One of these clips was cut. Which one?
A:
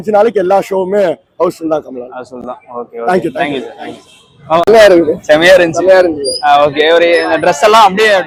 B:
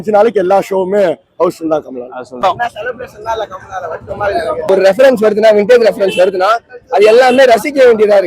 B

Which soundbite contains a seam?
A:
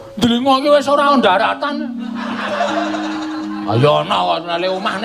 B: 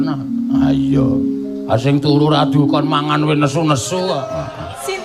A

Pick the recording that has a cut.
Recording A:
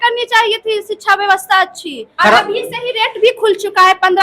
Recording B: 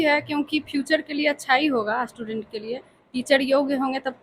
A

